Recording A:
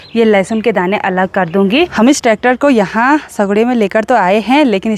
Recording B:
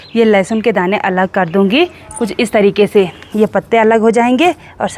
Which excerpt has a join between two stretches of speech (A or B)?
A